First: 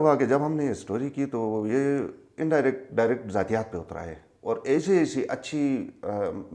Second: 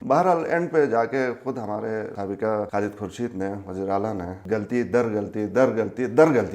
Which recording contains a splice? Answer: second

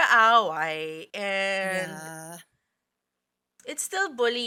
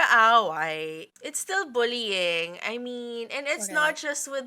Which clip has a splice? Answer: second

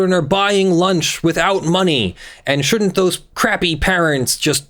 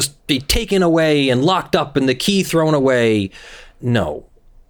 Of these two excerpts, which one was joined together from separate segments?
first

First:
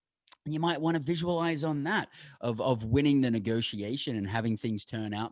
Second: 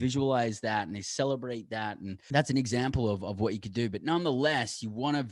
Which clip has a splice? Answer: second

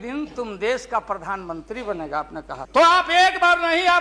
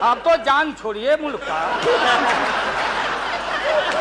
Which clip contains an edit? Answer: first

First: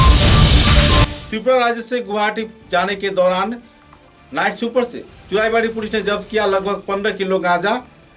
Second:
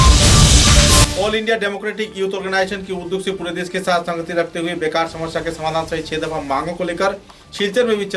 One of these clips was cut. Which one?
second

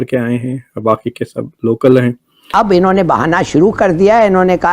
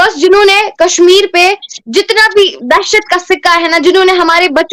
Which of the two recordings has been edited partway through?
first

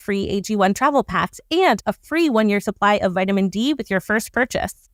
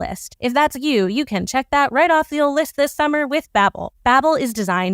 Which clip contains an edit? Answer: second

